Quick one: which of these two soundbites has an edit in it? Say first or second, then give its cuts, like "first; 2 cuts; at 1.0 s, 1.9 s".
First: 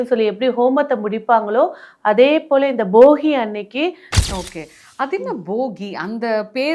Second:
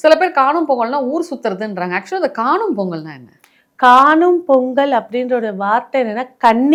first; 1 cut; at 4.1 s